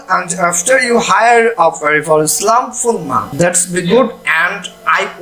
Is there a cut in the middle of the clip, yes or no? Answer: yes